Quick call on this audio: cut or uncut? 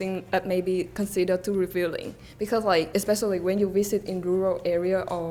uncut